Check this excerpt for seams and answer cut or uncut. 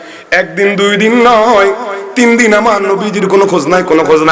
uncut